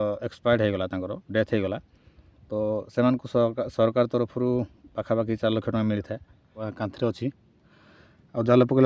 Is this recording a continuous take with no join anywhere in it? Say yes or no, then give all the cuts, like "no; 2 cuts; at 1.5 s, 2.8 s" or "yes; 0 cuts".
no; 1 cut; at 6.6 s